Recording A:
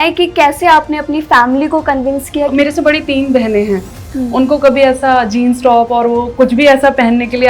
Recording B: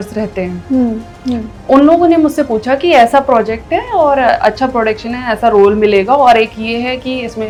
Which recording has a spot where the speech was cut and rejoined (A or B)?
A